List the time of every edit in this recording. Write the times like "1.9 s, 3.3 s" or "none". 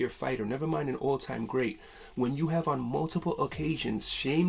none